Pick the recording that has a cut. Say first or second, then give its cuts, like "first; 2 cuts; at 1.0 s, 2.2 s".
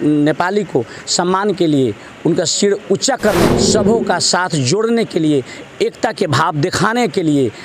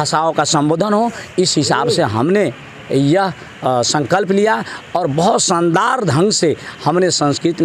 first; 1 cut; at 3.5 s